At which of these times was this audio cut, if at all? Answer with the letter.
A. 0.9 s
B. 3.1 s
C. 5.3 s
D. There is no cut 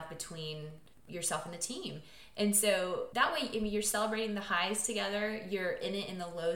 B